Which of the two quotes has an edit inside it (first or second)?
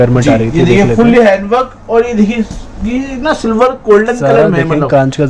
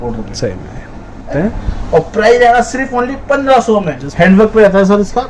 second